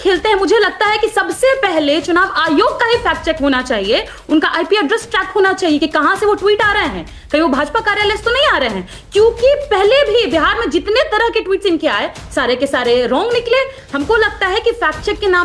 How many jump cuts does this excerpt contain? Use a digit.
0